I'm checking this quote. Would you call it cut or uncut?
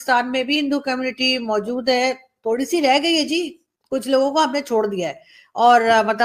uncut